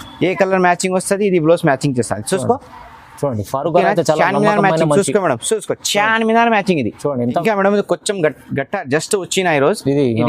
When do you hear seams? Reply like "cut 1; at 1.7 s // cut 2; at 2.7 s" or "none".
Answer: cut 1; at 7.4 s